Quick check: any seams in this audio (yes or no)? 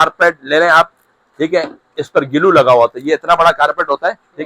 no